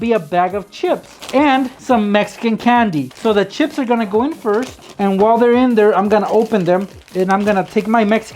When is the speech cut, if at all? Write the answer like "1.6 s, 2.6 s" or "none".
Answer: 1.8 s, 3.1 s, 4.8 s, 7.0 s